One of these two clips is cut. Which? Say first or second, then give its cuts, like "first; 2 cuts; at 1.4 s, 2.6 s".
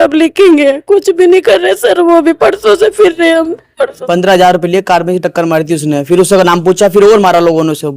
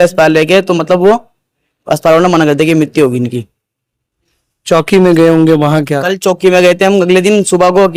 first; 1 cut; at 4.0 s